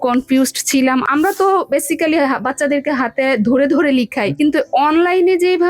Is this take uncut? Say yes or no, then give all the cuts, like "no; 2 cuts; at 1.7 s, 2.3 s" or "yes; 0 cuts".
no; 2 cuts; at 1.1 s, 4.4 s